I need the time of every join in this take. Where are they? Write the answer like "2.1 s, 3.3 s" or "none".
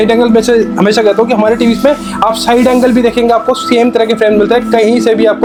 none